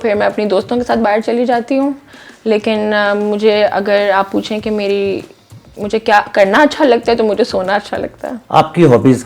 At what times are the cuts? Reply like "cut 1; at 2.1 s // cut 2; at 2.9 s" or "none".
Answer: none